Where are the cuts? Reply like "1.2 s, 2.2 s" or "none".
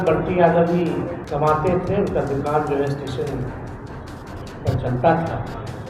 1.2 s